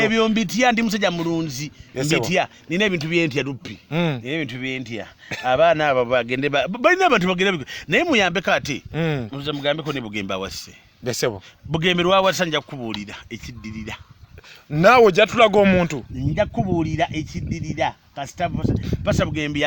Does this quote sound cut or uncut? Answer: uncut